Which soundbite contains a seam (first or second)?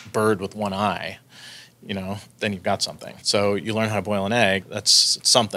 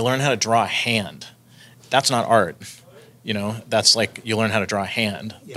first